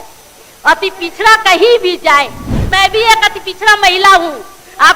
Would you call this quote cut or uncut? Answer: cut